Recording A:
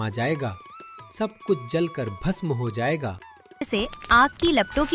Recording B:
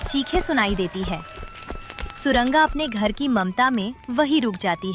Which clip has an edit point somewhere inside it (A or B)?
A